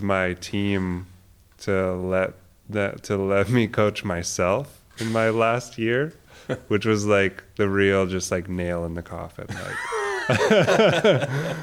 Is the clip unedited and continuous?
yes; 0 cuts

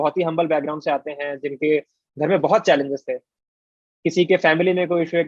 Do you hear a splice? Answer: no; 0 cuts

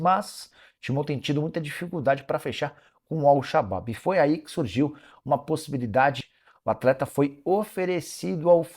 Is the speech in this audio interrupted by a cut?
yes; 1 cut; at 6.3 s

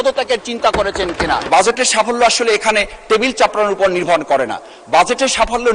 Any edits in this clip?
yes; 1 cut; at 1.4 s

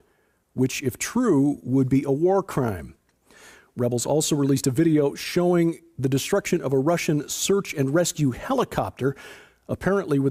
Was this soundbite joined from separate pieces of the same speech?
no; 0 cuts

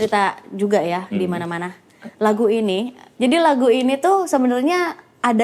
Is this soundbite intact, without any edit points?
yes; 0 cuts

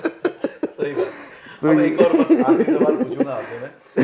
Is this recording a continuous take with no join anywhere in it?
yes; 0 cuts

